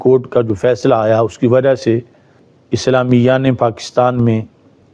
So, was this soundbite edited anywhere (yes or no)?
no